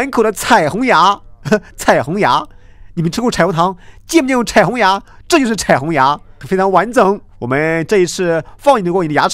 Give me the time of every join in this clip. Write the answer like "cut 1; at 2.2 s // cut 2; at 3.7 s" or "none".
cut 1; at 6.3 s // cut 2; at 7.3 s